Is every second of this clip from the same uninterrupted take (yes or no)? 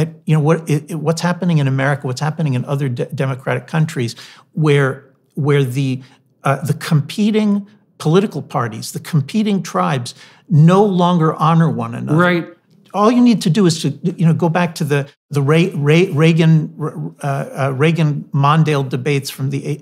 no